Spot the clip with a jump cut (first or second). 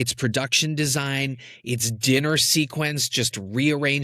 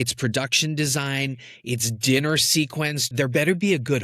second